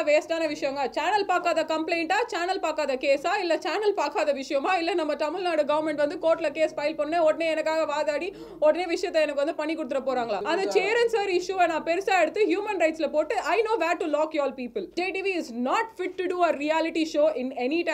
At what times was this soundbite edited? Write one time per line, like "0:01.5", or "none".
0:10.4
0:15.0